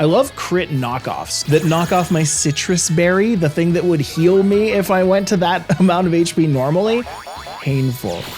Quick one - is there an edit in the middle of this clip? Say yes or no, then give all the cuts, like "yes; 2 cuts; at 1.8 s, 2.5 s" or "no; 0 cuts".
yes; 1 cut; at 1.3 s